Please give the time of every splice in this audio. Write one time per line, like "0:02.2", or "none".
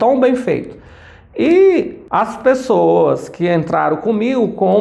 0:02.0